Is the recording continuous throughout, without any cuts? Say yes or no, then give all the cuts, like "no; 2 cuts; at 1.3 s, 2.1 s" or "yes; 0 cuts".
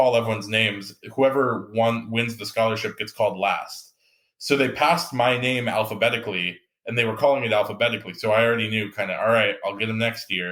yes; 0 cuts